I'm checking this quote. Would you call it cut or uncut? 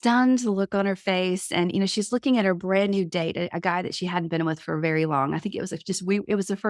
uncut